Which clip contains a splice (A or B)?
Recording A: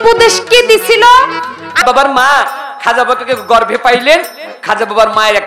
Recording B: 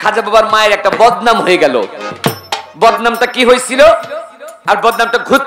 A